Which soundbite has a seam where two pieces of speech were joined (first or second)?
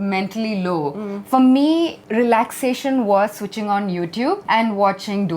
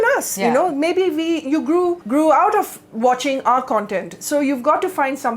first